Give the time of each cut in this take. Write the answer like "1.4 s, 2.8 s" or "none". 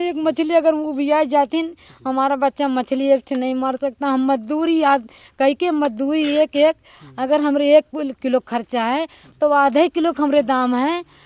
none